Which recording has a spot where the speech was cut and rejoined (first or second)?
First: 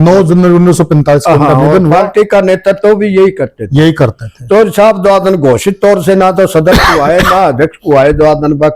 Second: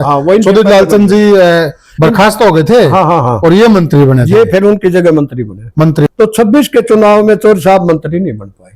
second